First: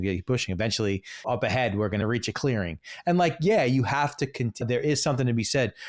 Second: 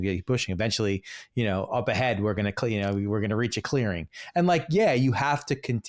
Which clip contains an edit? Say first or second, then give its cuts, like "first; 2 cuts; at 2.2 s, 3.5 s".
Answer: first; 3 cuts; at 1.2 s, 2.0 s, 4.6 s